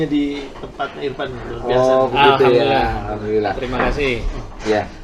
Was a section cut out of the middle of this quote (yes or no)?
no